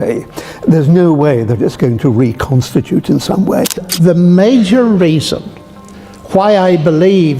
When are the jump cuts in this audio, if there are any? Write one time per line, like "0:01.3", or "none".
0:03.8